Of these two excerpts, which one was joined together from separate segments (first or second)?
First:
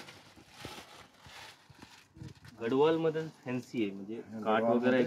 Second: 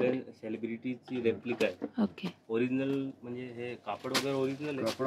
first